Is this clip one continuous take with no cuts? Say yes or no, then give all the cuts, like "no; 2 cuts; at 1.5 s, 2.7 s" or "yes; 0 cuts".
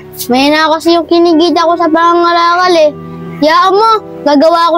yes; 0 cuts